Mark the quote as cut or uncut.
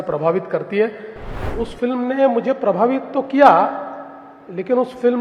cut